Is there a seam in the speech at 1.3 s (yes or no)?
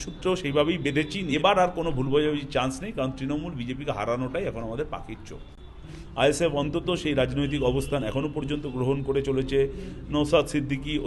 yes